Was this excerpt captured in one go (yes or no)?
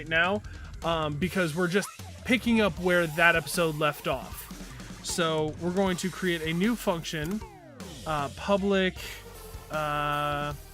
yes